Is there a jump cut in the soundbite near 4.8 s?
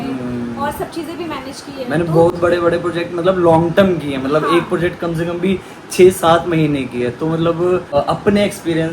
no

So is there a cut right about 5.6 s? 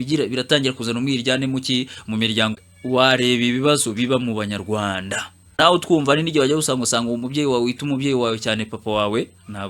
yes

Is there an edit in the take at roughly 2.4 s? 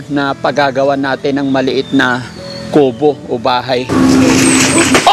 no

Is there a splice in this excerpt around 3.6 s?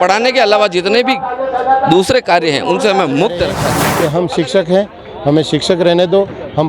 yes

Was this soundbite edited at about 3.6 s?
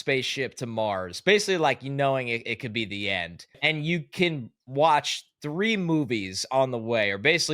yes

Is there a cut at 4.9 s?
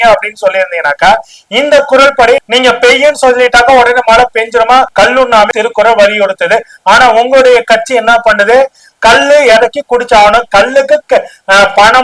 yes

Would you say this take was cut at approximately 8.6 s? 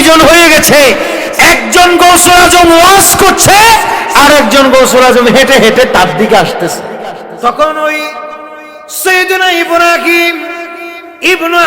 no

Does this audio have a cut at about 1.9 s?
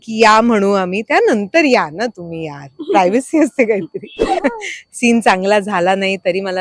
no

